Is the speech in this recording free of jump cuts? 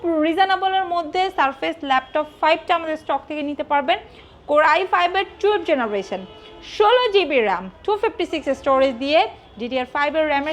yes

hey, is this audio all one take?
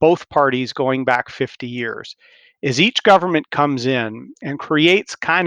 yes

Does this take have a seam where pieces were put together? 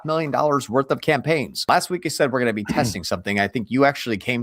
yes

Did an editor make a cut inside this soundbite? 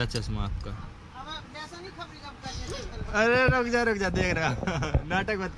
no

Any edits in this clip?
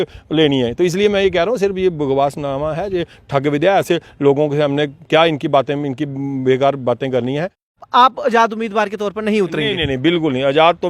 yes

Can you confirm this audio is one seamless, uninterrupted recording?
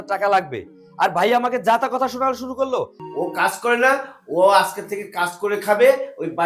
no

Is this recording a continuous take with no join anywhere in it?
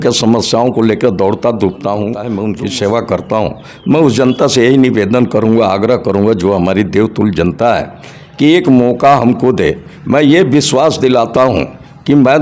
no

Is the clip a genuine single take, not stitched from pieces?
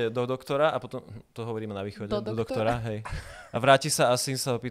yes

